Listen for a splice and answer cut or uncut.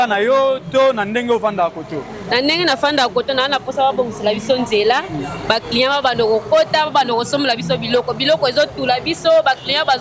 uncut